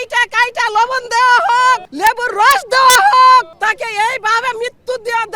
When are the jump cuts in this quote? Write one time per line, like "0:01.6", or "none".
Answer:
0:01.9
0:03.5